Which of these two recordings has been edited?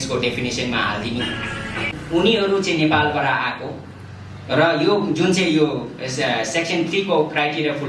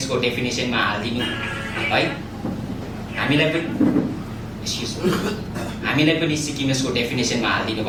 first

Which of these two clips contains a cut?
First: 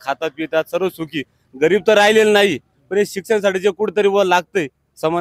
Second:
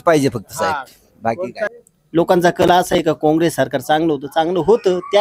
second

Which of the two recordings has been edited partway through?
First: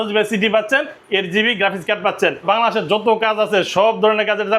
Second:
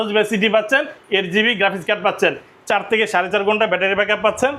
first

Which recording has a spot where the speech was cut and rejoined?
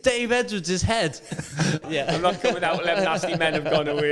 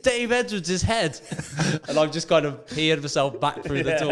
first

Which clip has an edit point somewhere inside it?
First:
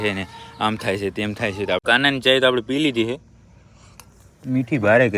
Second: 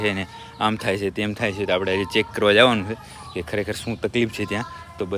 first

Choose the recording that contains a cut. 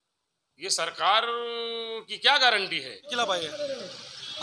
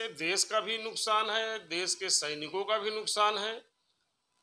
first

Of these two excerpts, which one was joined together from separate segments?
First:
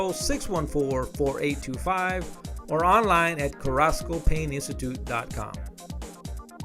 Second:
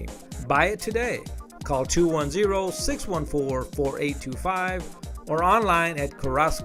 first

